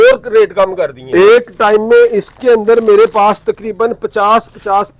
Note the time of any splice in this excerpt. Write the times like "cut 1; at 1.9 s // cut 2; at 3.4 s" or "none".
cut 1; at 1.0 s